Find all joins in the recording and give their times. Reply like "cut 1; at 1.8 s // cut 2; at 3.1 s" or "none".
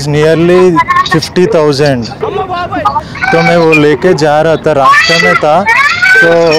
cut 1; at 3.1 s